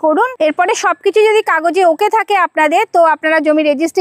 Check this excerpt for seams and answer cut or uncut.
uncut